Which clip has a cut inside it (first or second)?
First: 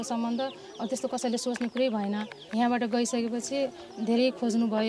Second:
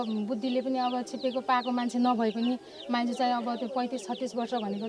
first